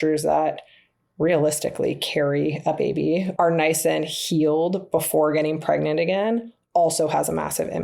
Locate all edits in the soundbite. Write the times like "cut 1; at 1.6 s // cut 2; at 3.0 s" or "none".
cut 1; at 3.3 s